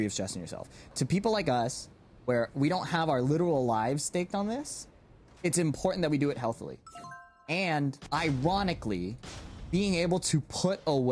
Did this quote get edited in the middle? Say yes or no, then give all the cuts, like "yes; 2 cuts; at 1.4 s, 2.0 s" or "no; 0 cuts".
yes; 2 cuts; at 0.9 s, 8.0 s